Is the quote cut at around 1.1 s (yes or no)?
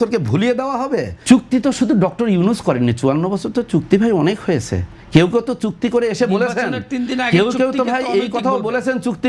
yes